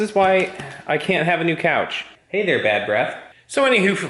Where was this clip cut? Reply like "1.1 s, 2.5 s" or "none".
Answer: 2.1 s

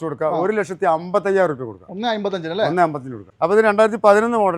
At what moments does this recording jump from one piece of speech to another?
3.3 s

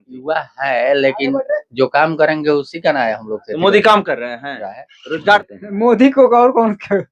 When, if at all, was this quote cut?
5.4 s

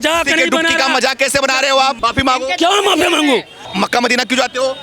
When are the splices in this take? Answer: 2.0 s, 3.6 s

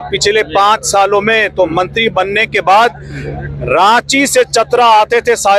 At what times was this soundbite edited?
none

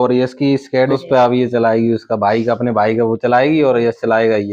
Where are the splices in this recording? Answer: 0.9 s

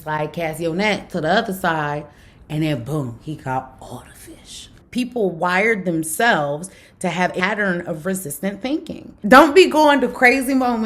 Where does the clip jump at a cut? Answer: 4.8 s, 7.4 s, 9.1 s

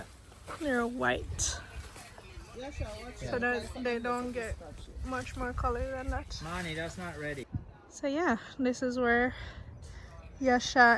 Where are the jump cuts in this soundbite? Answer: 7.4 s

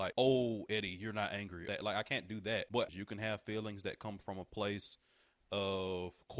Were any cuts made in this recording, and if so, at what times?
1.6 s, 2.9 s

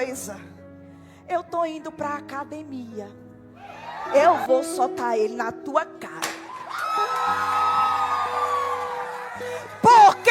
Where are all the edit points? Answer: 4.1 s

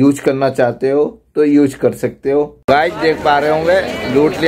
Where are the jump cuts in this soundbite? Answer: 2.6 s

